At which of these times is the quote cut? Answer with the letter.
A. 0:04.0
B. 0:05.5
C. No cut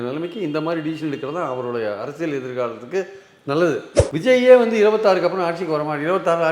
A